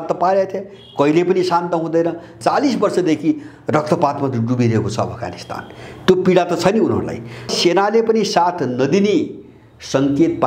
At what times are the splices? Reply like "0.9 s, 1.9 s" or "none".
2.3 s, 7.5 s